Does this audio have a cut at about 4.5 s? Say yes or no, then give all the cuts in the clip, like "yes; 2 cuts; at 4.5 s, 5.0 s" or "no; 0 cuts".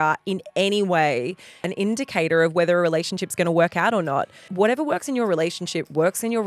yes; 1 cut; at 4.5 s